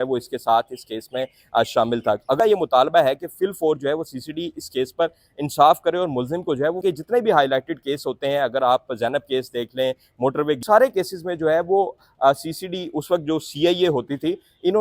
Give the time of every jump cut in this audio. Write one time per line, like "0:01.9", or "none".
0:02.4
0:06.8
0:10.6